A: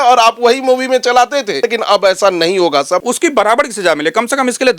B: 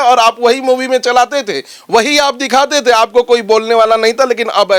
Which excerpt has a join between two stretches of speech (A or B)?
A